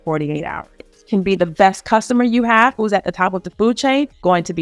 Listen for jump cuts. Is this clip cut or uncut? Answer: cut